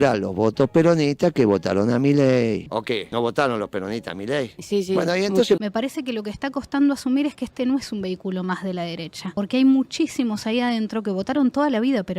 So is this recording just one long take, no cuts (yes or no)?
no